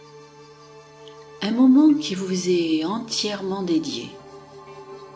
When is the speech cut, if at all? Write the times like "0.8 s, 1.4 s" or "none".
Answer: 1.4 s, 4.1 s